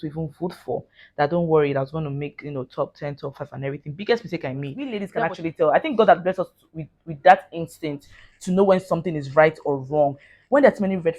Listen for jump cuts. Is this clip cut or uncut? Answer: cut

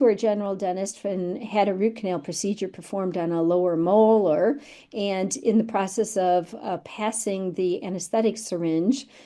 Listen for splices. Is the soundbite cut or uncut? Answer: uncut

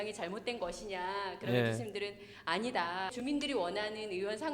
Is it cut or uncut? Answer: cut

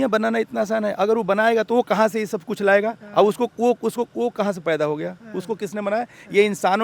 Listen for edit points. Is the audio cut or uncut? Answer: uncut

